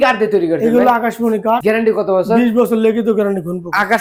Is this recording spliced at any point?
no; 0 cuts

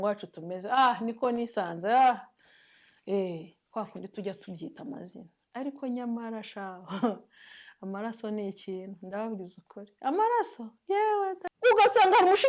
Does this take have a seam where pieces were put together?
yes; 1 cut; at 11.5 s

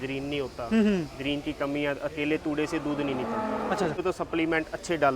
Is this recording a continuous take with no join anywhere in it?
no; 1 cut; at 4.0 s

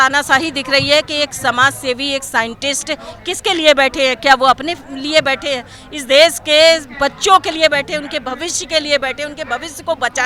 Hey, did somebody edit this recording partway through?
no; 0 cuts

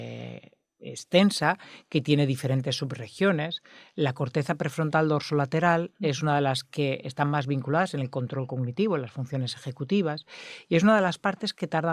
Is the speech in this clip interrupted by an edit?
no; 0 cuts

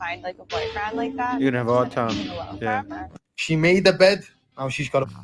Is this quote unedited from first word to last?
yes; 0 cuts

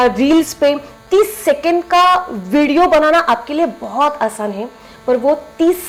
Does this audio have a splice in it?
no; 0 cuts

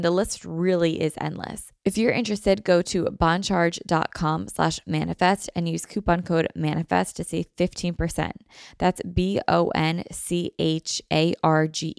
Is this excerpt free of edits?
no; 1 cut; at 1.6 s

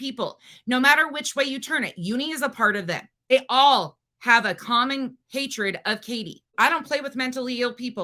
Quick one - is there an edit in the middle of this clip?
yes; 2 cuts; at 3.3 s, 6.5 s

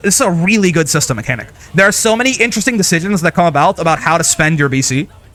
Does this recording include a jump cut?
no; 0 cuts

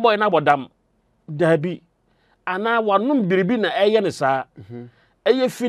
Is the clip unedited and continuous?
yes; 0 cuts

